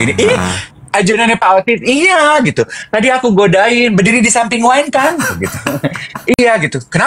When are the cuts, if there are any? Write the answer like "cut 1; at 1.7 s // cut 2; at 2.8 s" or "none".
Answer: none